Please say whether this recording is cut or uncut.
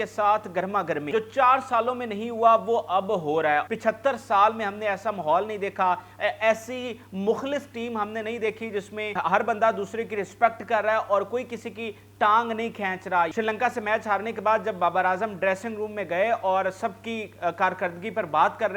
cut